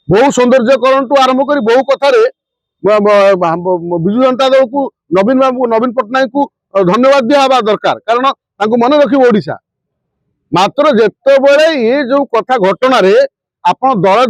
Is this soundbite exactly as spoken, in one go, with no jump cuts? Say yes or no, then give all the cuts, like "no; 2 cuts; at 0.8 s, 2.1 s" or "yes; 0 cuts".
yes; 0 cuts